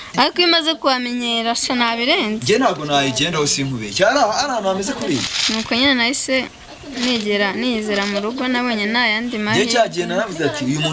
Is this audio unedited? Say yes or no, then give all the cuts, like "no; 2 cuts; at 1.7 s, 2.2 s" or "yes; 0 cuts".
no; 1 cut; at 5.3 s